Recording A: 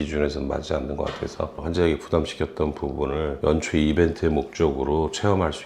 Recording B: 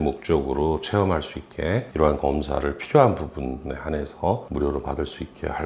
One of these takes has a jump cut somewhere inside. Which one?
A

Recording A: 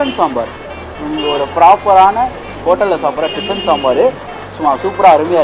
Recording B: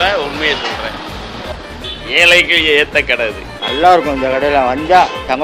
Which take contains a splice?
B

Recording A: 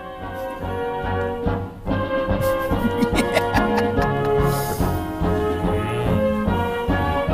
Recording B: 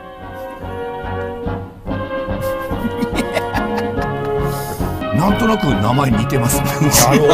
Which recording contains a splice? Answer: B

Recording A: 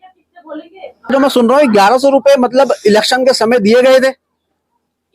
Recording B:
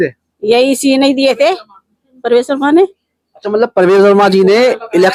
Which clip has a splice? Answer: A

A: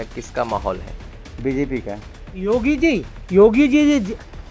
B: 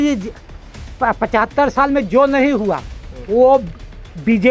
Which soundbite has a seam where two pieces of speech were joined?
A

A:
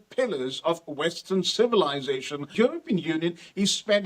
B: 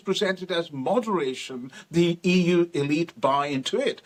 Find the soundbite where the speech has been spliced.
A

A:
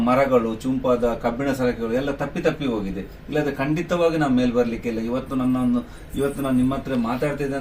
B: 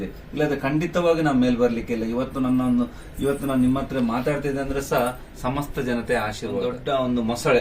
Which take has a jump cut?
B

